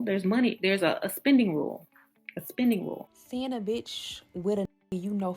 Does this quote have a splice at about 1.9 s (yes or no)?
no